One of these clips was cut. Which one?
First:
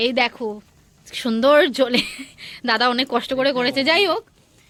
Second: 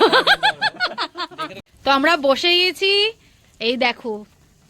second; 1 cut; at 1.6 s

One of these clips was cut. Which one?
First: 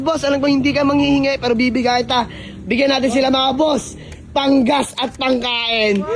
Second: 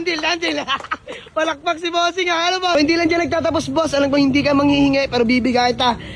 second; 1 cut; at 2.7 s

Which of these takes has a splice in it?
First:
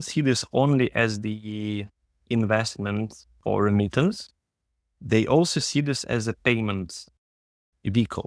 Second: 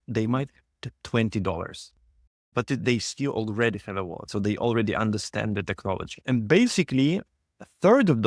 second; 2 cuts; at 4.2 s, 6.1 s

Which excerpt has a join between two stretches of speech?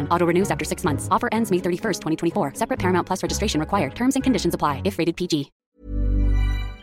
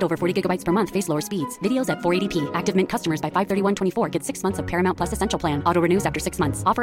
first; 1 cut; at 5.5 s

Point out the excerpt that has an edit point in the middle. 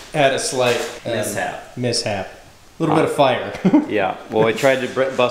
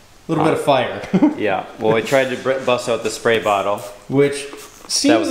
first; 1 cut; at 1.0 s

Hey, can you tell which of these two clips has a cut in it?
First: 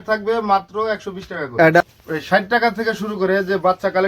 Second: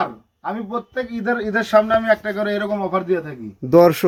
first; 1 cut; at 1.8 s

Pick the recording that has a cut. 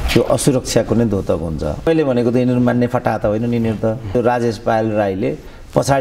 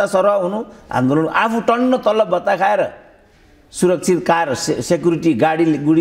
first; 2 cuts; at 1.9 s, 4.1 s

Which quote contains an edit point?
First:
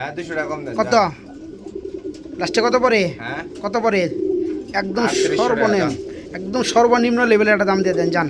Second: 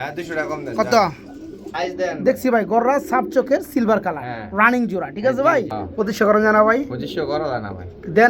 second; 2 cuts; at 1.7 s, 5.8 s

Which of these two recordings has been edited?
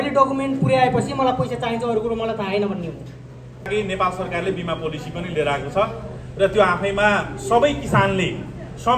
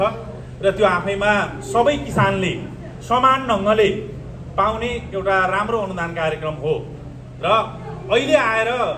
first; 1 cut; at 3.7 s

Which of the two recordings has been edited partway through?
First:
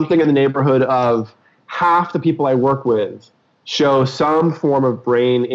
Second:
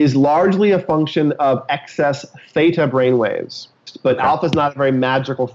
second; 1 cut; at 3.8 s

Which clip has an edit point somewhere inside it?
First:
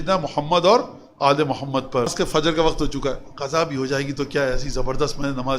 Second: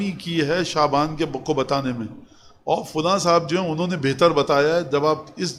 first; 1 cut; at 2.1 s

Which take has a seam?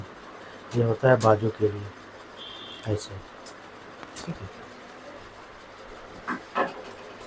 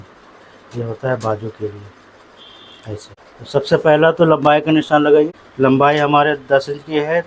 second; 2 cuts; at 3.2 s, 5.3 s

